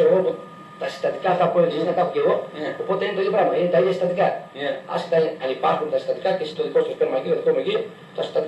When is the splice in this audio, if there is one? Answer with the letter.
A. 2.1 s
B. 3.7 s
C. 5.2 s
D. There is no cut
A